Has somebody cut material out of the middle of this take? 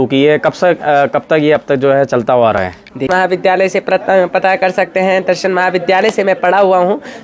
yes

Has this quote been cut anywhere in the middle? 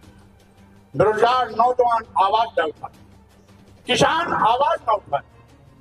yes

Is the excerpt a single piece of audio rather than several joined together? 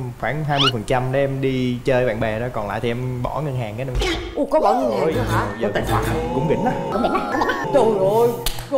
yes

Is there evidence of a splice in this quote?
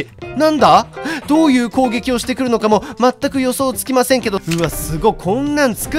yes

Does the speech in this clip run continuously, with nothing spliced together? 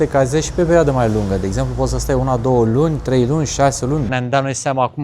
no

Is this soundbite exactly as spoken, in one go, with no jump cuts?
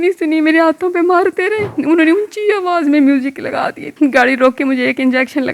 no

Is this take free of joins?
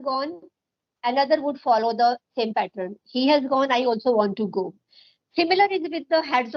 yes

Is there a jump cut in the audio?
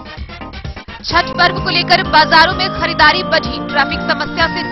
yes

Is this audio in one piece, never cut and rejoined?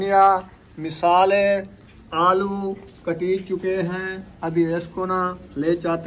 yes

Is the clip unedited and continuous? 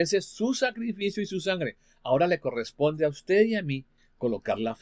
yes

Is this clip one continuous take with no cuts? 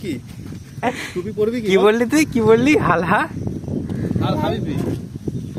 yes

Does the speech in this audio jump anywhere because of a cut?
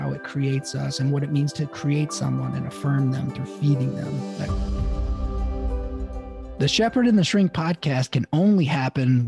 yes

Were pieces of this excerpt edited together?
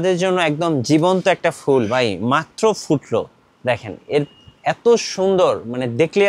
no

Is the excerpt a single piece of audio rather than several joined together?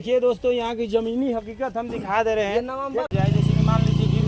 no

